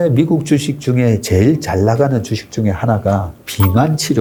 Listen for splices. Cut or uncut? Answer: uncut